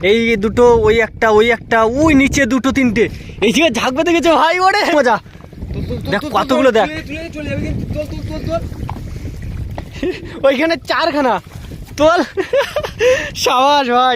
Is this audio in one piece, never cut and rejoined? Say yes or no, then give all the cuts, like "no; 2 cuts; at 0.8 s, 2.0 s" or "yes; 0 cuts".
no; 1 cut; at 4.9 s